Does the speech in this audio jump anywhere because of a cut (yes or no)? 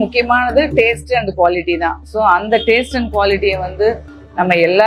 no